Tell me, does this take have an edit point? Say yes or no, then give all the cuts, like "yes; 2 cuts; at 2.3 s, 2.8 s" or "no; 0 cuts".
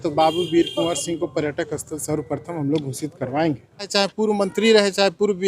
yes; 1 cut; at 3.9 s